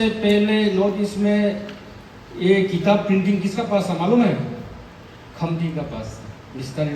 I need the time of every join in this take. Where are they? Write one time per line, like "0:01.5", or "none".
none